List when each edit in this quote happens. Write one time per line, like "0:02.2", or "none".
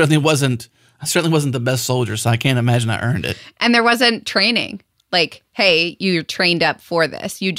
0:03.6